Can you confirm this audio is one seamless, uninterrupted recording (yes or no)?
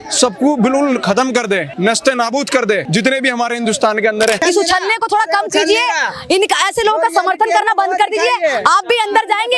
no